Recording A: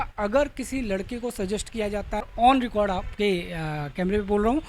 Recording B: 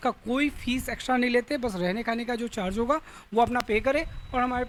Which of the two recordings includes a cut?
A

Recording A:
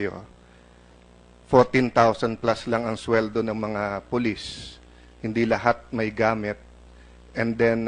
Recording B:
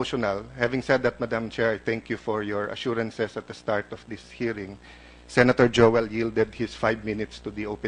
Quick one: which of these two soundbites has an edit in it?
B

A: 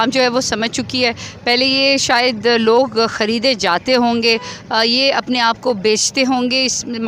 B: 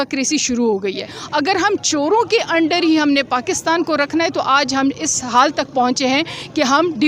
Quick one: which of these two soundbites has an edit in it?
B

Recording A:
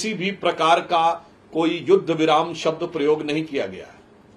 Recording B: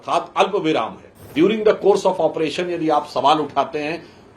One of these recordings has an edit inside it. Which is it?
B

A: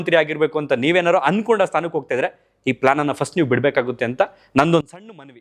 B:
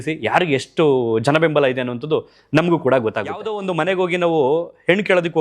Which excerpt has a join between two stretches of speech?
B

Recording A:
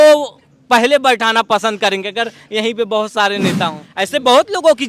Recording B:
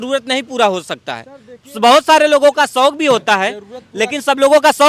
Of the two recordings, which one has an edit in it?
A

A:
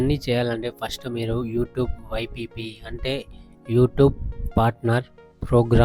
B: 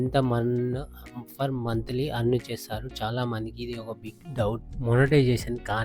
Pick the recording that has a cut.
B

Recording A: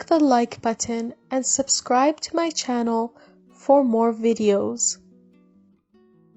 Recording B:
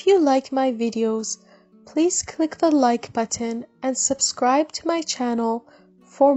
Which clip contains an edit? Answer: A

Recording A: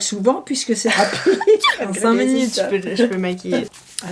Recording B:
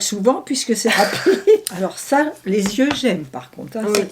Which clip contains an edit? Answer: B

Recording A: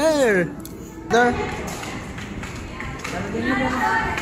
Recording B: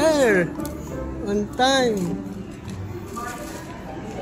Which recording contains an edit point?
A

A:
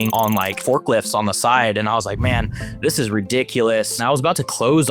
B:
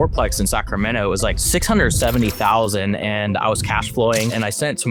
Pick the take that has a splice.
A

